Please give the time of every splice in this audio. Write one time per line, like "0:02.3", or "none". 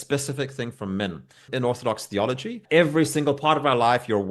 0:01.5
0:02.6